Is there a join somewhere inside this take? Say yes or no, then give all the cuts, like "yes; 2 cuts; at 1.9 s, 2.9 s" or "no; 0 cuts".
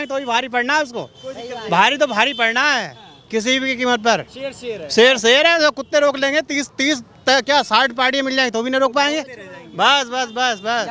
no; 0 cuts